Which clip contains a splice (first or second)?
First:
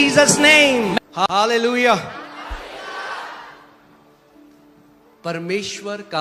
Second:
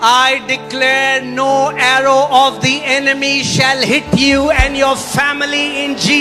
first